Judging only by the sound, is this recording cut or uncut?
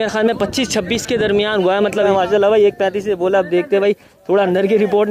cut